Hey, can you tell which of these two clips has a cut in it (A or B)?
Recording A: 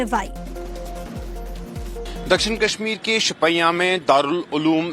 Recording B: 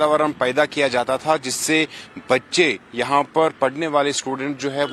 A